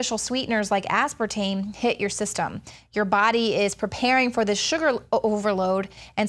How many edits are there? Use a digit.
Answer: 1